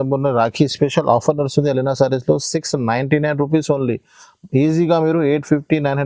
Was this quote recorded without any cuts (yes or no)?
yes